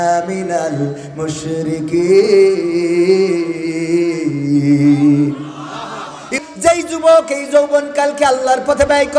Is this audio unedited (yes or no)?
no